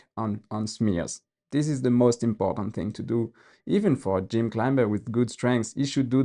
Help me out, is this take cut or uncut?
uncut